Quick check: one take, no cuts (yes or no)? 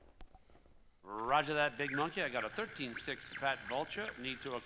no